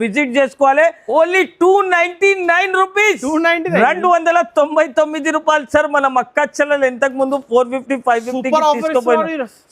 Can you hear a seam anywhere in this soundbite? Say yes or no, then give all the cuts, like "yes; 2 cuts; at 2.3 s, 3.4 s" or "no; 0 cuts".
yes; 1 cut; at 1.0 s